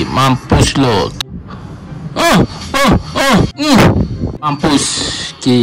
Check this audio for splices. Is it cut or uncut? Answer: cut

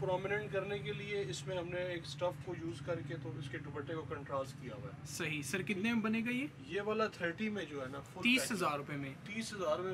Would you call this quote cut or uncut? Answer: uncut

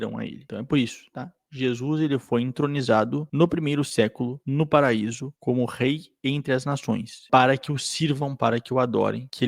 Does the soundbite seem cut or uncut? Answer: cut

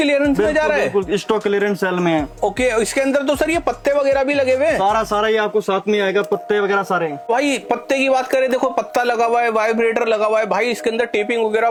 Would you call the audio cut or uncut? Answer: uncut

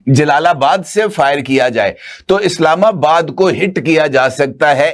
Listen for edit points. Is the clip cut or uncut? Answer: uncut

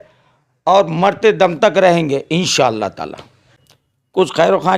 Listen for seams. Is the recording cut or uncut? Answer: cut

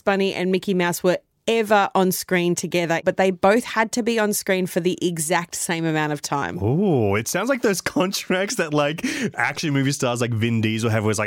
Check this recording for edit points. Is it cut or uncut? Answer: cut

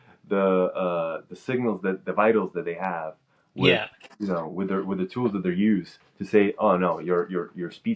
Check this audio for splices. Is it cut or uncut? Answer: uncut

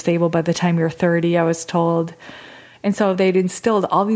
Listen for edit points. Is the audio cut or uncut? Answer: uncut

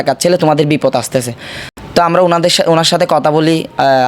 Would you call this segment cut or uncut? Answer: uncut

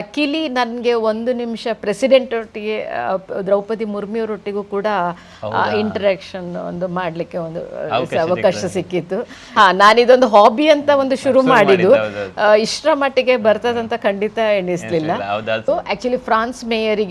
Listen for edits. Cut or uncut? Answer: cut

